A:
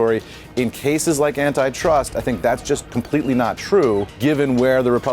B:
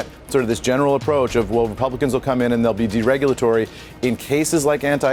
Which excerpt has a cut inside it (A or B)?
A